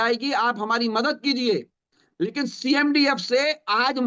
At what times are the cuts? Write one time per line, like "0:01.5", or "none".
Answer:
none